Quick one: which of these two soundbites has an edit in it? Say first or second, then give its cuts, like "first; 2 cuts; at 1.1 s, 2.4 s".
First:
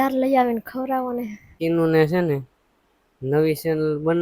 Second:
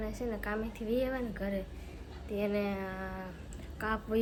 first; 1 cut; at 1.4 s